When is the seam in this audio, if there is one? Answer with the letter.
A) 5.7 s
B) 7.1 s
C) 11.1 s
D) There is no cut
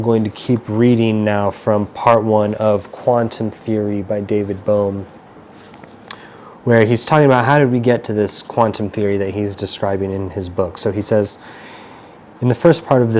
D